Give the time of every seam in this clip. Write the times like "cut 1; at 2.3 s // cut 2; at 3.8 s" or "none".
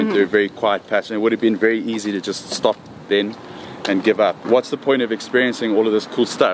cut 1; at 4.4 s